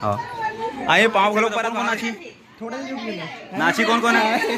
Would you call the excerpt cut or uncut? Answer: cut